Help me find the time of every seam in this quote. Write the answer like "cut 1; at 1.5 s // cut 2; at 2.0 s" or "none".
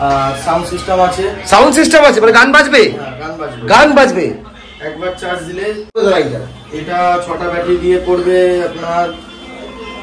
cut 1; at 6.0 s